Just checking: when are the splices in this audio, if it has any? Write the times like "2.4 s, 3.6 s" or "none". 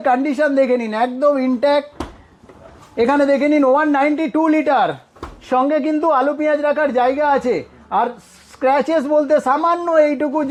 none